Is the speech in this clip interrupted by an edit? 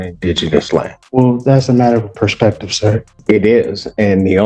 yes; 2 cuts; at 1.0 s, 3.1 s

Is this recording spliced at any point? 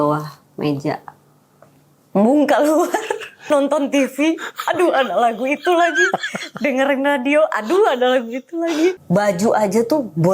yes; 2 cuts; at 3.4 s, 9.0 s

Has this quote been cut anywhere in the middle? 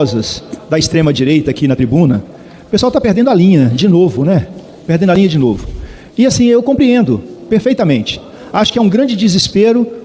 no; 0 cuts

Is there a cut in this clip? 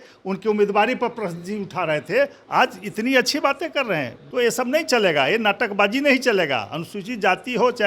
yes; 1 cut; at 4.2 s

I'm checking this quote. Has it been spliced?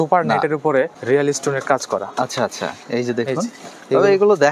yes; 1 cut; at 1.0 s

